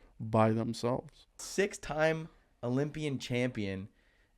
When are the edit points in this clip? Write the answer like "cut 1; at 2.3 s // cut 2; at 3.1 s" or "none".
cut 1; at 1.4 s